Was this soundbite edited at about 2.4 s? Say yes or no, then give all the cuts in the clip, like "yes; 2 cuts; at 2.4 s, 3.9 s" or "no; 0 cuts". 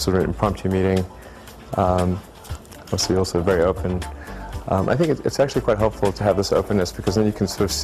yes; 1 cut; at 2.4 s